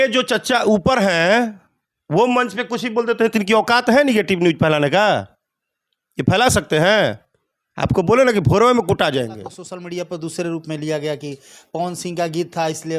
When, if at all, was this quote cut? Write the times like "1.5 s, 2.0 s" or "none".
9.7 s